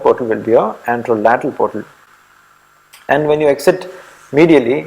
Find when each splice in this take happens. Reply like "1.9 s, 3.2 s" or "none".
none

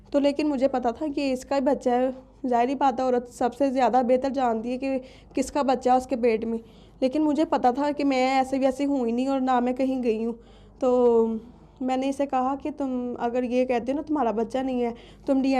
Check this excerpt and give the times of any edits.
none

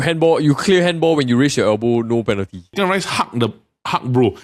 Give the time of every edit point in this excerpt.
2.7 s

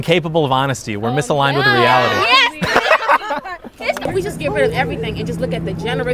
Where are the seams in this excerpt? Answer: 4.0 s

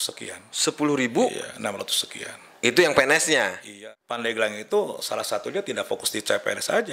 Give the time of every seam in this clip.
3.7 s

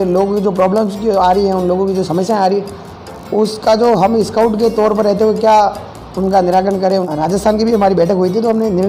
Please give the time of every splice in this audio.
7.1 s

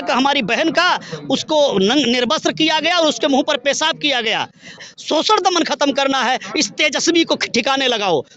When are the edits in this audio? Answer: 4.8 s

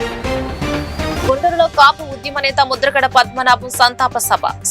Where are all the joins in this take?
none

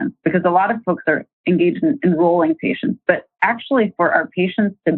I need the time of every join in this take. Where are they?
1.4 s

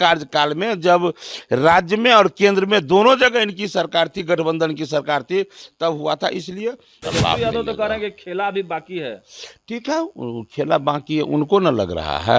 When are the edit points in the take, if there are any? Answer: 6.9 s

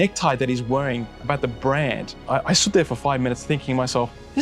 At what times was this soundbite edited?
2.1 s

